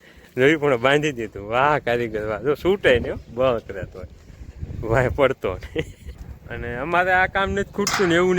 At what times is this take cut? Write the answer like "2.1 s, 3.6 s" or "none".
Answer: 6.0 s